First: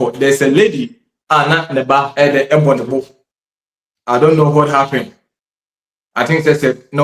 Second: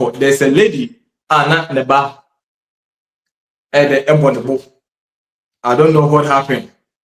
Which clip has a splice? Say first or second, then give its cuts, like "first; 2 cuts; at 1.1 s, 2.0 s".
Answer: first; 1 cut; at 2.1 s